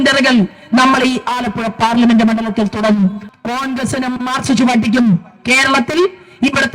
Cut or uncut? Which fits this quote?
cut